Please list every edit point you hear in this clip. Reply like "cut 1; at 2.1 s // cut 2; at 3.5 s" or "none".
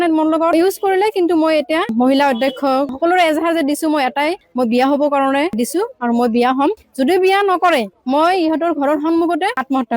cut 1; at 1.9 s // cut 2; at 2.9 s

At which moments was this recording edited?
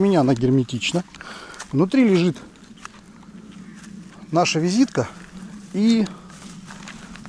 none

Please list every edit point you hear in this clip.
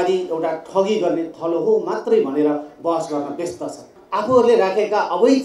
cut 1; at 3.9 s

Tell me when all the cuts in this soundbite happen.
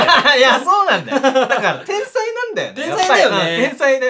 none

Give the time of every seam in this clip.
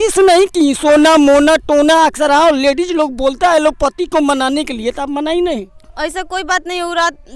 none

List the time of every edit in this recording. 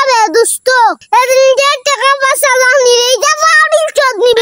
none

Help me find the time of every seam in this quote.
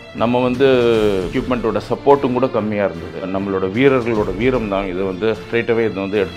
cut 1; at 1.3 s // cut 2; at 3.3 s // cut 3; at 5.4 s

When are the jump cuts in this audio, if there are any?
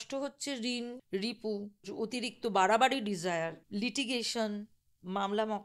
cut 1; at 1.0 s // cut 2; at 1.8 s // cut 3; at 3.6 s

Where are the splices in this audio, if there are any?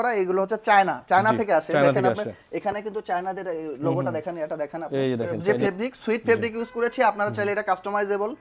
cut 1; at 5.3 s

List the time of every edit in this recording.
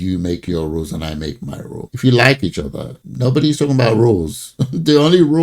none

